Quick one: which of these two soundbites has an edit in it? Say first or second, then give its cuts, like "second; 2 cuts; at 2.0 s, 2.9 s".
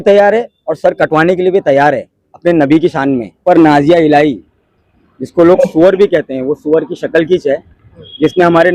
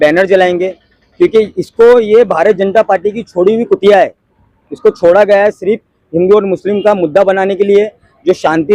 first; 1 cut; at 3.4 s